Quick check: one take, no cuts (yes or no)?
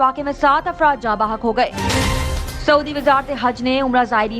no